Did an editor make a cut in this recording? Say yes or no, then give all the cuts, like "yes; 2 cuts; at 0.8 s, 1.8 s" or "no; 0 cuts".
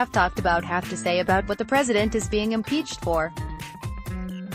yes; 1 cut; at 3.3 s